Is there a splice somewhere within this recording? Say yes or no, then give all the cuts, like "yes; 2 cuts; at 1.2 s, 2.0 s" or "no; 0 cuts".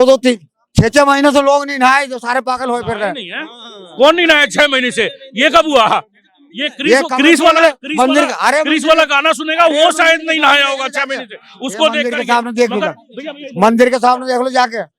no; 0 cuts